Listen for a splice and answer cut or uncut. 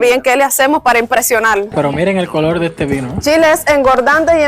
cut